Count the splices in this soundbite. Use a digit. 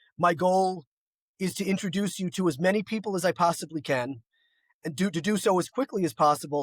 0